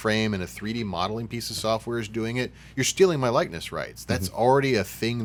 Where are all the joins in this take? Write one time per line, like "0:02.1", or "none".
none